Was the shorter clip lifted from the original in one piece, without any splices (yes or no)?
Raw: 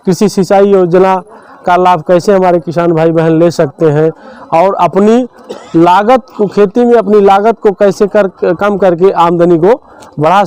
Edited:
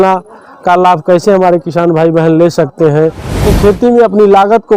no